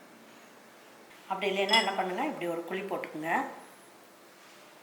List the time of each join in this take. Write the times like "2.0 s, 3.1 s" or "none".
1.1 s